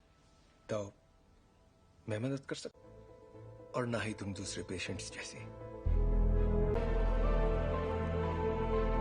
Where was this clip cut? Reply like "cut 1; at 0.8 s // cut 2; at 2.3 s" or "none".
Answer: cut 1; at 6.8 s